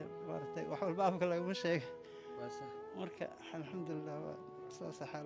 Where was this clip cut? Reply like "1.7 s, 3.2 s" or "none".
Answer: none